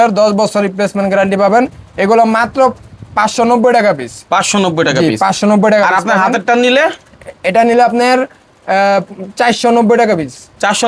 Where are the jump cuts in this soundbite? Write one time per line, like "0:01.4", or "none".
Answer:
none

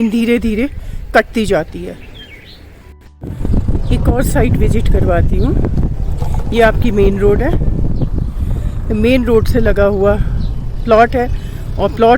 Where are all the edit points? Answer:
0:03.4

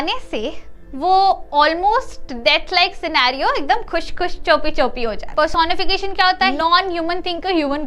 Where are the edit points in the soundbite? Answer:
0:05.3
0:06.5

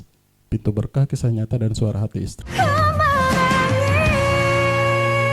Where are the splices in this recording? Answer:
0:02.4

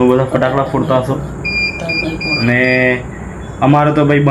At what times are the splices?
none

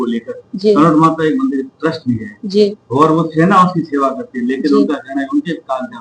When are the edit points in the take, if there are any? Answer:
none

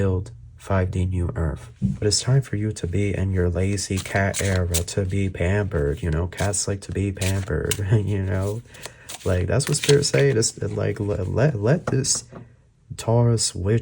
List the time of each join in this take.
0:02.0

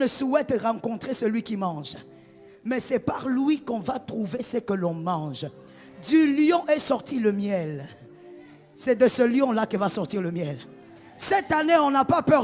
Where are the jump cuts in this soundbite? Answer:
none

